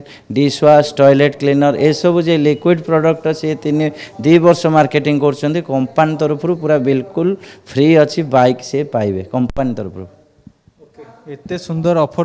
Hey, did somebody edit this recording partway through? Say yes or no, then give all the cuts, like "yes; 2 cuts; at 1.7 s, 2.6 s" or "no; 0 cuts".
no; 0 cuts